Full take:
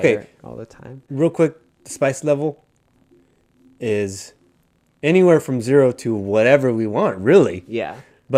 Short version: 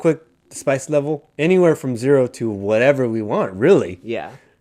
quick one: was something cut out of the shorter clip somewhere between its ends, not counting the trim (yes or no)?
yes